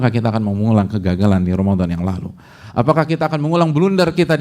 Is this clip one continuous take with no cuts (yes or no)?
yes